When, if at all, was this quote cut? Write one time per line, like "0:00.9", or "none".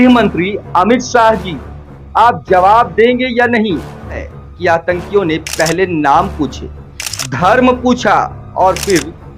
0:04.3